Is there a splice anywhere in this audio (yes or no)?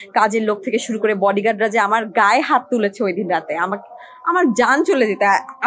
no